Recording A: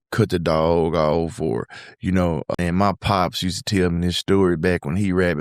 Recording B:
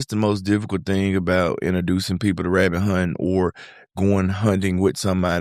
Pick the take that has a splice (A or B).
A